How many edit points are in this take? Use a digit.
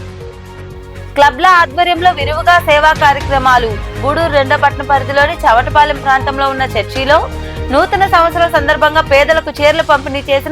1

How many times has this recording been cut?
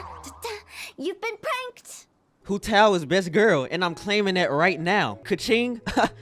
1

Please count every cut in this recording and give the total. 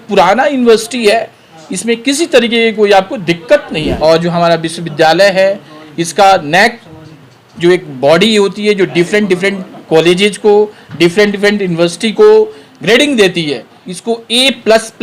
1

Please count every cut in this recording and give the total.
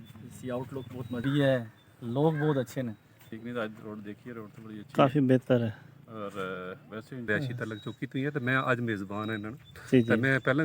3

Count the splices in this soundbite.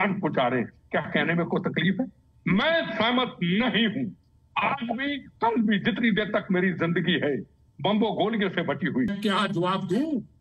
1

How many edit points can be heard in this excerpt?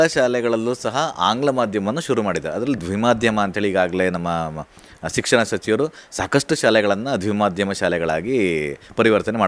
0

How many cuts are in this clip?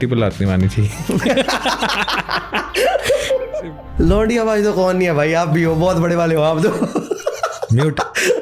1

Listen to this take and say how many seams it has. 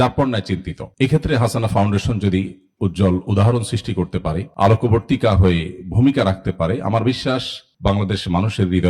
0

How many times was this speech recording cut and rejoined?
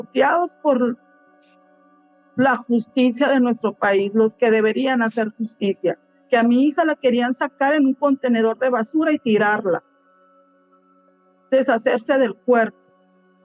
1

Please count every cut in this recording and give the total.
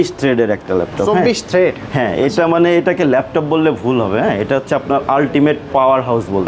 0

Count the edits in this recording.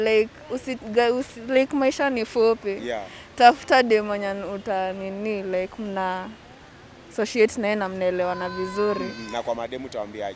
0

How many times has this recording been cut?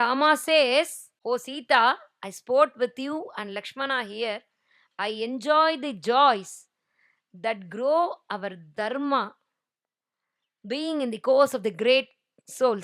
1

